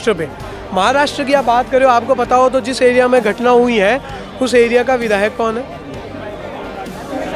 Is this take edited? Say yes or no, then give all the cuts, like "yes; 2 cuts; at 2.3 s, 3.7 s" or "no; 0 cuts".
no; 0 cuts